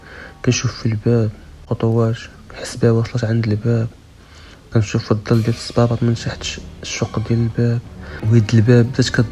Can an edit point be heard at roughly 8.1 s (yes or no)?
yes